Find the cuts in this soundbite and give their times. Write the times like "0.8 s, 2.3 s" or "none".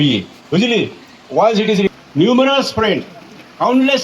1.9 s